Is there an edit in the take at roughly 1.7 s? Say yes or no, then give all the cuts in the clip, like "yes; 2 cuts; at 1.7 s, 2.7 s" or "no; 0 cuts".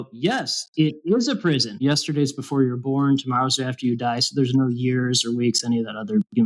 yes; 1 cut; at 1.7 s